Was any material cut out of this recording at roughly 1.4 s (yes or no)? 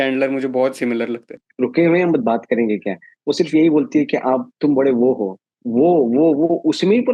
yes